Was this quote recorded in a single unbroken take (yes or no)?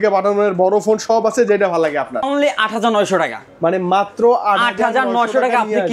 no